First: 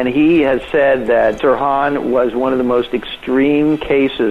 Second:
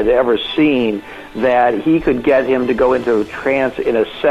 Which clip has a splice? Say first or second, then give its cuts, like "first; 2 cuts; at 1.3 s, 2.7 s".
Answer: first; 1 cut; at 1.4 s